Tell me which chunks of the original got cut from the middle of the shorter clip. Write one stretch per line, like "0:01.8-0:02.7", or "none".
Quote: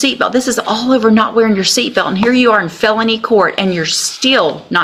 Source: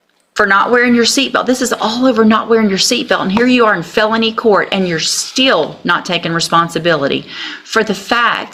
none

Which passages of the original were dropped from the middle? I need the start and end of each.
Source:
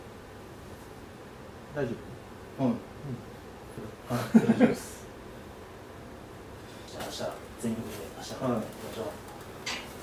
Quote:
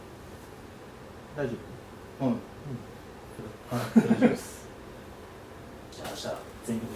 0:06.3-0:06.9

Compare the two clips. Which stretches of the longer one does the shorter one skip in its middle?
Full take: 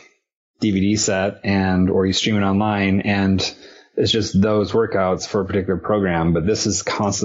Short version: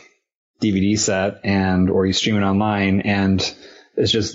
none

